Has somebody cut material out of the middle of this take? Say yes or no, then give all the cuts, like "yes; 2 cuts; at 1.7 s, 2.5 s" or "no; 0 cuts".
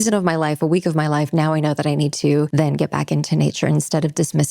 yes; 1 cut; at 2.5 s